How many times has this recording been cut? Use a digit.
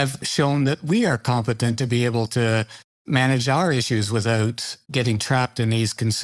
0